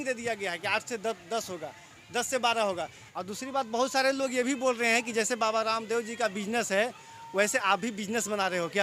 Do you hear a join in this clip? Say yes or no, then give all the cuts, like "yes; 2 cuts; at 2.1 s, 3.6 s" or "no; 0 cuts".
yes; 1 cut; at 3.0 s